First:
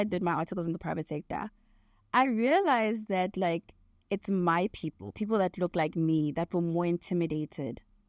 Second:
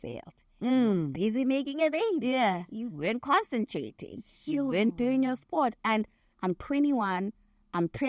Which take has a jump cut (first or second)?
second